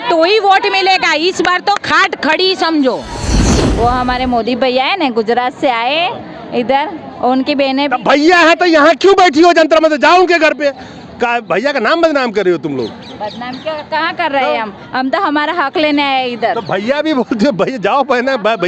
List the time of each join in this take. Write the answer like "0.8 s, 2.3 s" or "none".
3.3 s